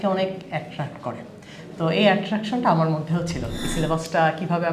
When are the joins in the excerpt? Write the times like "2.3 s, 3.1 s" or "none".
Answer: 3.6 s